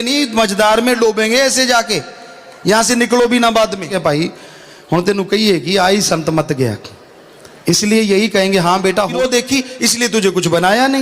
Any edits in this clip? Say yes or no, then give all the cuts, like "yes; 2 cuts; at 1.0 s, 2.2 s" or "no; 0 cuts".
yes; 2 cuts; at 3.9 s, 9.2 s